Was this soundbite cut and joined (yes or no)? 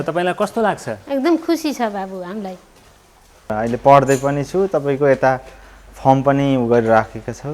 yes